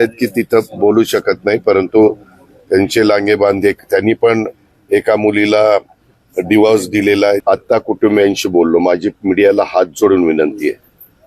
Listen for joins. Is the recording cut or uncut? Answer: cut